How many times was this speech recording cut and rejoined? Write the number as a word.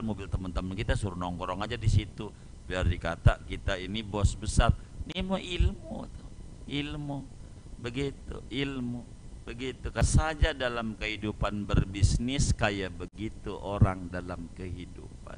one